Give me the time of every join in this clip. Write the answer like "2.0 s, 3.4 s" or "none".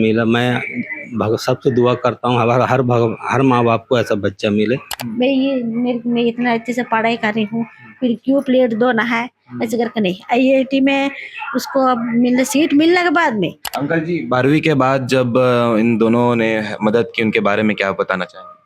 5.0 s, 13.6 s